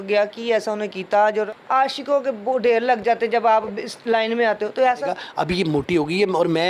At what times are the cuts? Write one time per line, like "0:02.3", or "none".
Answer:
0:01.5
0:05.2